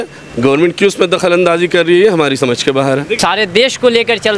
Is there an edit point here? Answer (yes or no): yes